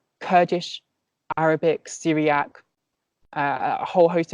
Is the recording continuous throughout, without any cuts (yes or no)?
yes